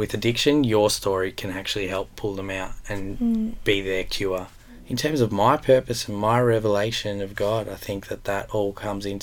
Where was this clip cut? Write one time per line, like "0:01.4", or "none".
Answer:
0:04.8